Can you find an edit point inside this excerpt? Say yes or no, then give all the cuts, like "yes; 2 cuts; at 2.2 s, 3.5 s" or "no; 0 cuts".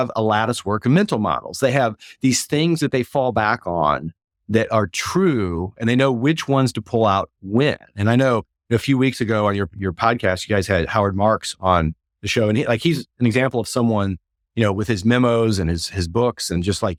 no; 0 cuts